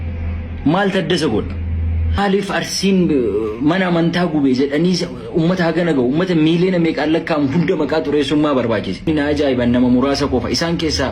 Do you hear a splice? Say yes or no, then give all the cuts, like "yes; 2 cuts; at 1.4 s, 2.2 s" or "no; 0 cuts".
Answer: yes; 2 cuts; at 2.2 s, 9.1 s